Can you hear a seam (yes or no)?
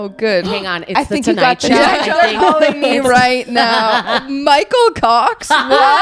no